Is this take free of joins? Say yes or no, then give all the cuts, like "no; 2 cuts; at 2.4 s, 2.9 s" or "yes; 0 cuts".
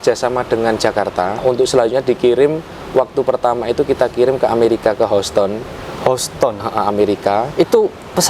no; 1 cut; at 1.4 s